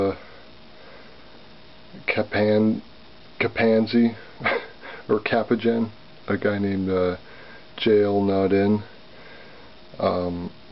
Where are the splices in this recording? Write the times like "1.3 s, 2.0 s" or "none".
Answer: 5.3 s